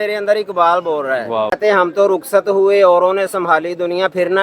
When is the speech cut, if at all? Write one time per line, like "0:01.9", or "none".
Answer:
0:01.5

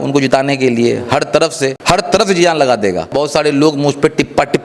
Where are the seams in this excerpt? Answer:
0:01.8
0:03.1

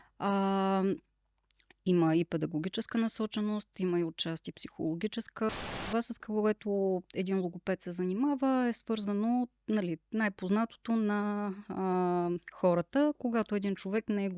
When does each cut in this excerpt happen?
0:05.7

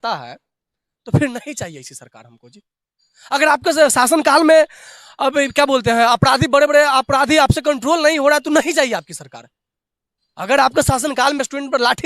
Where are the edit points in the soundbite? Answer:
none

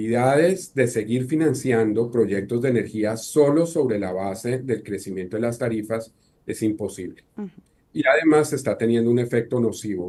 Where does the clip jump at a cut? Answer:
none

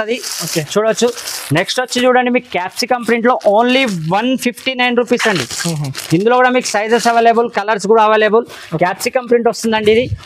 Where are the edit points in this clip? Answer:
none

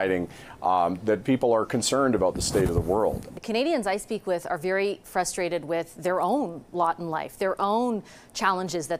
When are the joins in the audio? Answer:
0:03.3

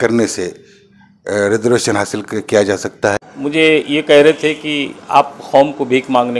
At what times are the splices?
0:03.2

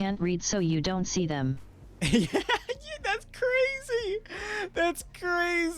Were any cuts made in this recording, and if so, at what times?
none

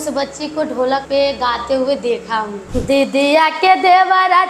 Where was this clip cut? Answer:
0:01.0
0:02.6

